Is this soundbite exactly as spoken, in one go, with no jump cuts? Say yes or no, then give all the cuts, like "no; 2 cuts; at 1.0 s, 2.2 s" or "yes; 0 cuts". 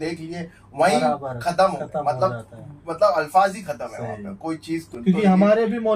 no; 1 cut; at 4.9 s